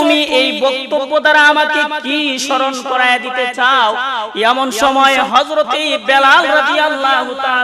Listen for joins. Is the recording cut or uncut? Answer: uncut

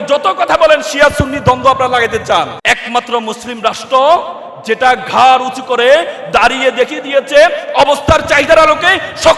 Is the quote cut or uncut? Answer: cut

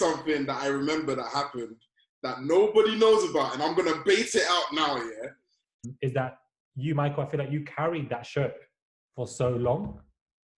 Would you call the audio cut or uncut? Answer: cut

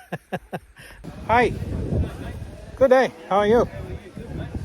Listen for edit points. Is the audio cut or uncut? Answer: uncut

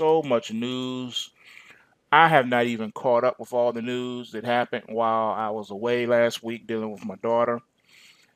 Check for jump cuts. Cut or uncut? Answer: cut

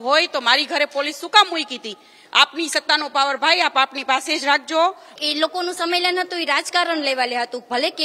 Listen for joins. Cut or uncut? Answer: cut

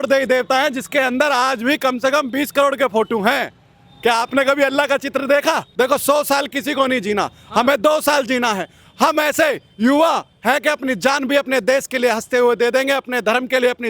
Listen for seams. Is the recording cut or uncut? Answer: cut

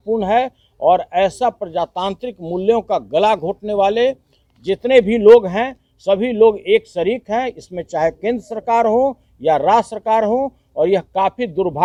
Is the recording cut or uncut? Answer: uncut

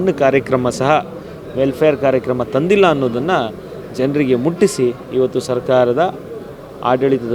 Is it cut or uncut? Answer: uncut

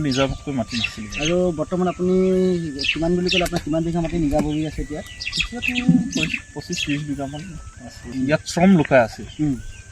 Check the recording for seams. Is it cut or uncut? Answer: cut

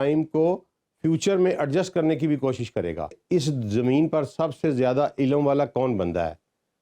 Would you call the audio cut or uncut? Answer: cut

